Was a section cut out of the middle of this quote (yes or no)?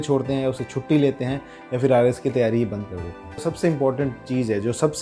yes